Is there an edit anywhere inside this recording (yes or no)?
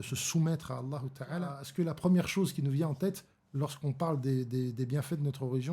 yes